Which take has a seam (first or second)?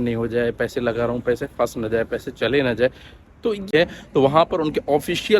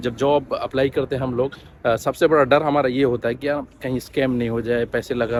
first